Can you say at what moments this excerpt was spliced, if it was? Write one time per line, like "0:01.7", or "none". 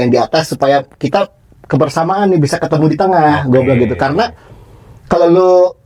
none